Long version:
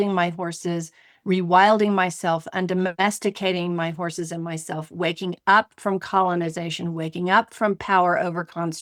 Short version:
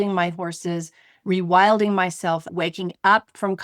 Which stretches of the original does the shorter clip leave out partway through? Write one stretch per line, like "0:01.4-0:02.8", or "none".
0:02.5-0:04.9